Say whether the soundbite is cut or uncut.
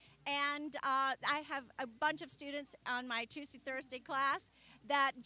cut